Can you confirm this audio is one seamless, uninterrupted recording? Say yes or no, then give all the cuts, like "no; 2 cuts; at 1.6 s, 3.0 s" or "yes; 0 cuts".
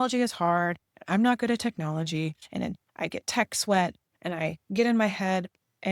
no; 1 cut; at 2.4 s